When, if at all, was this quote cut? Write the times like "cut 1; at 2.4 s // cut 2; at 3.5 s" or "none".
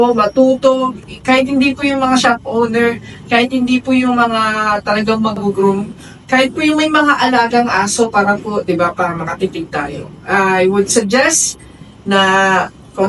cut 1; at 1.0 s